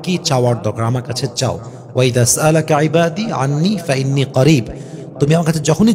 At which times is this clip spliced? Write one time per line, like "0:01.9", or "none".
none